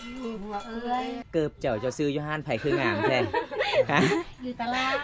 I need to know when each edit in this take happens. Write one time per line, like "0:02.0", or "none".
0:01.2

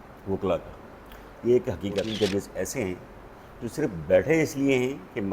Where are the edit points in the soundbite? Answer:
0:02.1

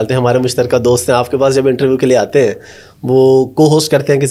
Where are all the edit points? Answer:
none

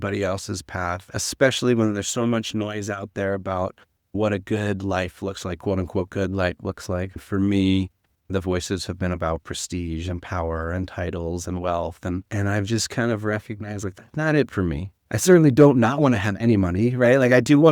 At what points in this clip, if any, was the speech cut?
0:07.2
0:12.3

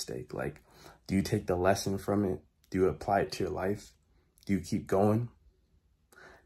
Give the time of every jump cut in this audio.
none

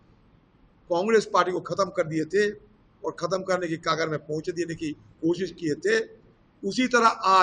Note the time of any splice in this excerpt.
none

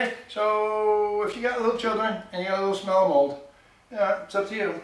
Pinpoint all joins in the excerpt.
none

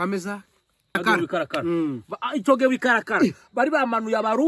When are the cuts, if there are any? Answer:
0:01.0

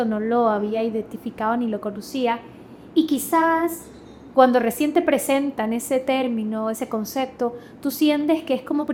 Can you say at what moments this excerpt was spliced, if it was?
none

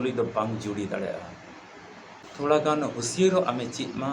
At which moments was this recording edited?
0:02.3

